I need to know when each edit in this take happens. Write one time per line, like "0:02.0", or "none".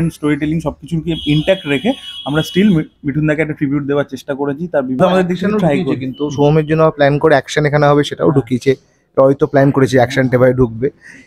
0:05.0

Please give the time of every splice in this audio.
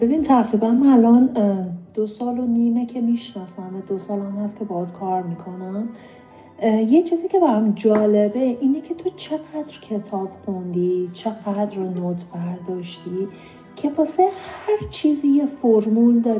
none

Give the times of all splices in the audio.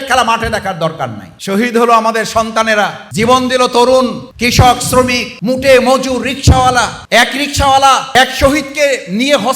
0:01.3
0:03.0
0:04.3
0:05.3
0:07.0
0:08.1

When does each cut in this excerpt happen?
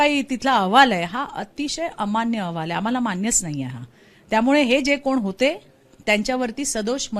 none

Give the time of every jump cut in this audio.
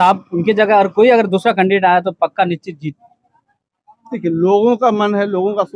none

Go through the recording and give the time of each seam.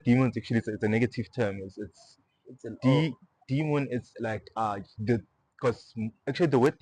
none

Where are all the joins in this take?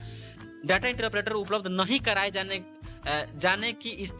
none

